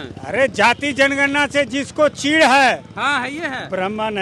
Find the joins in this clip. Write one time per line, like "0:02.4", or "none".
none